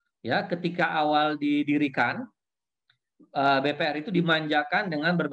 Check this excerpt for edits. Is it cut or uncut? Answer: uncut